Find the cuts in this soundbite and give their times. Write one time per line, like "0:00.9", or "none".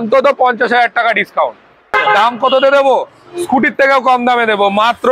0:02.0